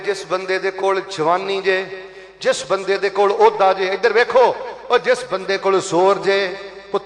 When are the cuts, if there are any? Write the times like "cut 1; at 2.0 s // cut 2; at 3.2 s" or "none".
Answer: none

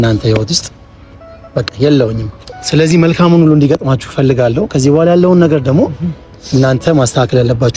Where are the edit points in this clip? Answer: cut 1; at 2.5 s

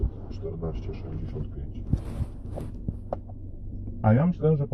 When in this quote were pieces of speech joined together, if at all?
none

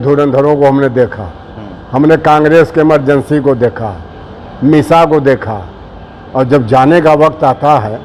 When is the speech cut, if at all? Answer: none

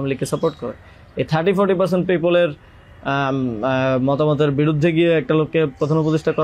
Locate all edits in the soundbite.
none

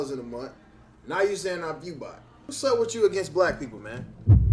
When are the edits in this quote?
cut 1; at 1.0 s

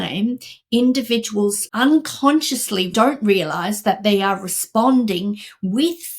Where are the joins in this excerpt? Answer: cut 1; at 1.6 s // cut 2; at 2.9 s

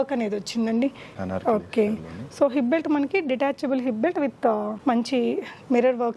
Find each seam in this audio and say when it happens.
cut 1; at 1.1 s

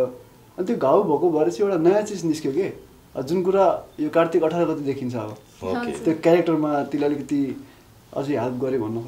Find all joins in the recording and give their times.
none

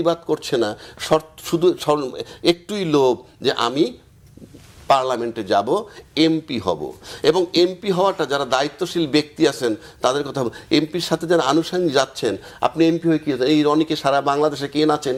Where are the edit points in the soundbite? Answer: none

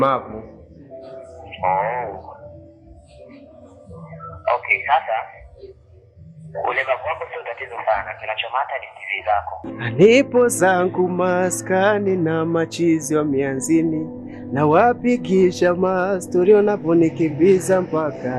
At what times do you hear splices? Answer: cut 1; at 9.6 s

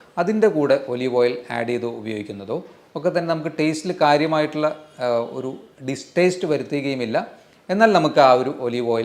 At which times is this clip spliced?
none

